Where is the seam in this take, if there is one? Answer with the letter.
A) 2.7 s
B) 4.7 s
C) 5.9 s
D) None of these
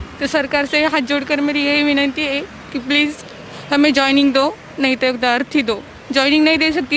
D